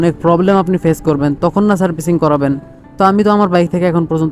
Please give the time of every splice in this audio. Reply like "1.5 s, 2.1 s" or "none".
none